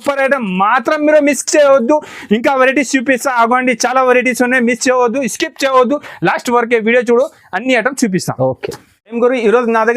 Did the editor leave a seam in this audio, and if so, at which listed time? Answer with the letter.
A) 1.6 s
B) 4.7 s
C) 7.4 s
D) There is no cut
D